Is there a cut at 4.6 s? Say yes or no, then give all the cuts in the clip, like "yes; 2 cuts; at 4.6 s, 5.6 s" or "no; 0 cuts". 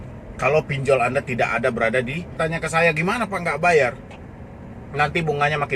no; 1 cut; at 2.4 s